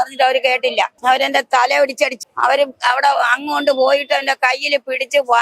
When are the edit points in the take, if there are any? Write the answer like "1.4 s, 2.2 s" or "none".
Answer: 0.9 s, 2.2 s

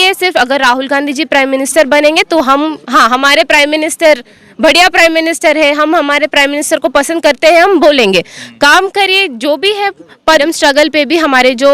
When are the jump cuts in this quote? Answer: 10.2 s

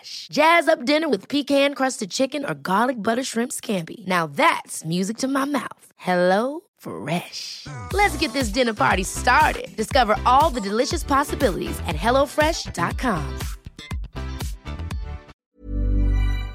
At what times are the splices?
15.3 s

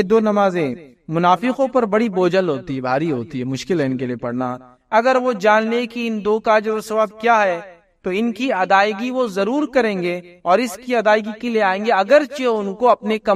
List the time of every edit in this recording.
none

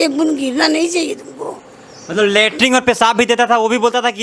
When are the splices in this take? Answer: none

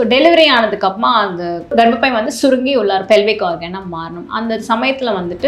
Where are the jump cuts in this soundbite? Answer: 1.7 s

